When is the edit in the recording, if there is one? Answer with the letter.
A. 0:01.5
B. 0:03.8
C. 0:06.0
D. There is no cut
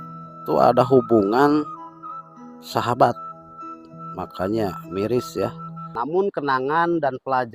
C